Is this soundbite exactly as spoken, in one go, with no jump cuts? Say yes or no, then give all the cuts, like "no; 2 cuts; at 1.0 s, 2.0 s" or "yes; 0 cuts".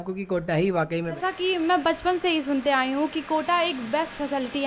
no; 1 cut; at 1.2 s